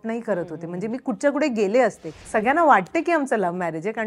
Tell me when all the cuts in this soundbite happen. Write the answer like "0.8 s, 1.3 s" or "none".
2.1 s